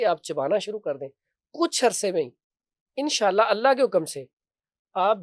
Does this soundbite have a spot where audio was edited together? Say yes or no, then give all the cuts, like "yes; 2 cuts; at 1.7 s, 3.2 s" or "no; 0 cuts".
no; 0 cuts